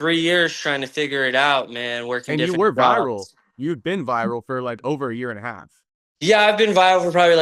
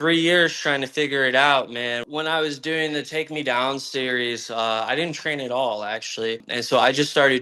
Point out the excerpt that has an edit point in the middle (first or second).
second